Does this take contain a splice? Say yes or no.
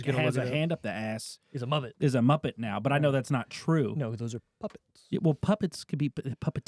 no